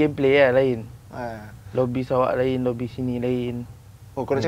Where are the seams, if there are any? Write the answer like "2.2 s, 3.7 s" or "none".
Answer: none